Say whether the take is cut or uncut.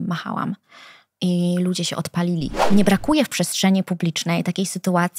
cut